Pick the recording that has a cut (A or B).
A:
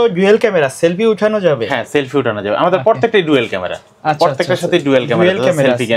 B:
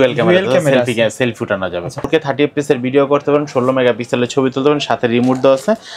B